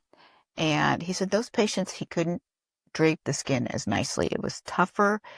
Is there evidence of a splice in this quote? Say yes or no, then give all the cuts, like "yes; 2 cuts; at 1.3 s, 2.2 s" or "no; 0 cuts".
no; 0 cuts